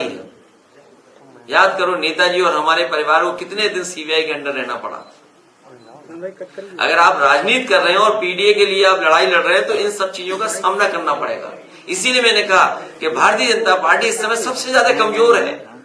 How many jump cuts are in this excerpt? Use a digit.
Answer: 0